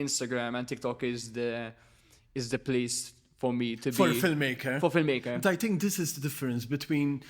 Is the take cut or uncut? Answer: uncut